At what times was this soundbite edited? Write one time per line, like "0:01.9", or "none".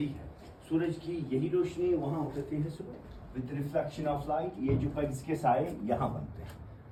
none

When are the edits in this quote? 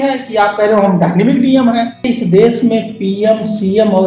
0:02.0

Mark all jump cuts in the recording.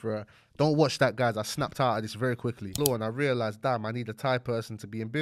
0:02.8

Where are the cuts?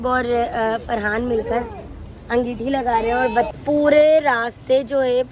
0:03.5

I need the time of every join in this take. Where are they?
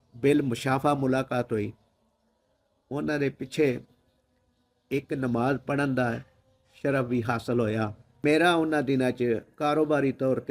0:08.2

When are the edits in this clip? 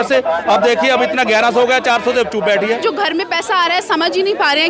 0:02.8

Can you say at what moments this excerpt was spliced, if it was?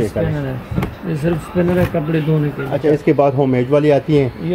0:02.8

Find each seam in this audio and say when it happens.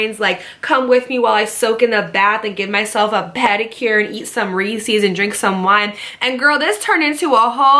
none

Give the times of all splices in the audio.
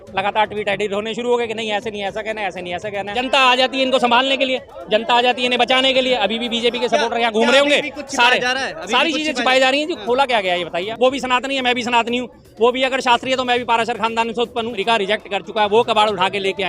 0:03.2
0:10.9
0:14.8

